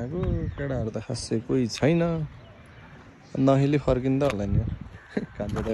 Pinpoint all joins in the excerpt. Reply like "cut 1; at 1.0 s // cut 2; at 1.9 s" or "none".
none

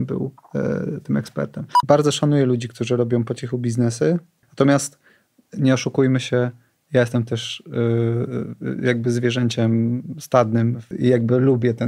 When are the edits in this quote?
cut 1; at 1.7 s // cut 2; at 4.4 s // cut 3; at 10.9 s

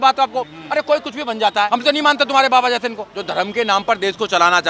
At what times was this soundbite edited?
cut 1; at 1.7 s // cut 2; at 3.0 s

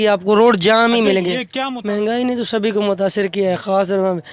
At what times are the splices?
cut 1; at 1.4 s

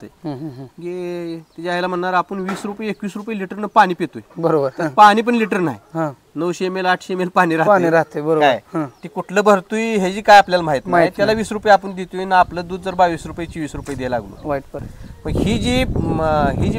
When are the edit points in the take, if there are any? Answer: none

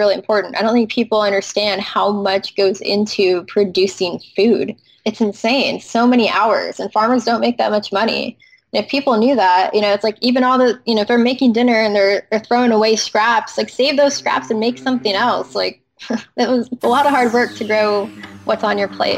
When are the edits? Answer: none

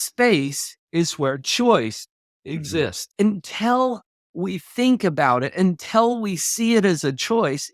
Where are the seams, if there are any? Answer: cut 1; at 3.0 s

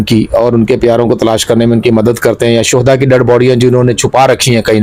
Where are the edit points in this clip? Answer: none

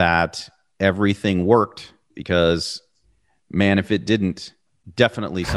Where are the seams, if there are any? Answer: cut 1; at 2.1 s

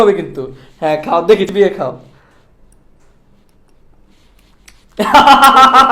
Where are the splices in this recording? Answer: cut 1; at 1.5 s

